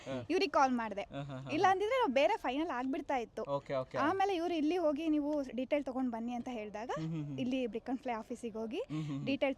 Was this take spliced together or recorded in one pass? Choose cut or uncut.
uncut